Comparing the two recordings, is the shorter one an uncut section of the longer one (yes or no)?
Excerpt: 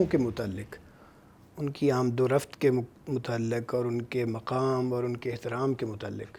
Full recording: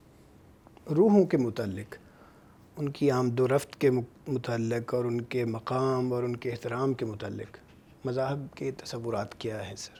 yes